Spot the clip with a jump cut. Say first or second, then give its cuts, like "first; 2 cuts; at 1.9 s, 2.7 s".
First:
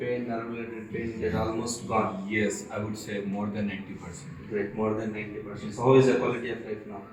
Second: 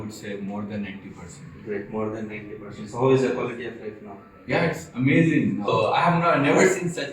second; 1 cut; at 5.7 s